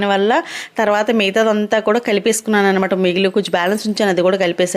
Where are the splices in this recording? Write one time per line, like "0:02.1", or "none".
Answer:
none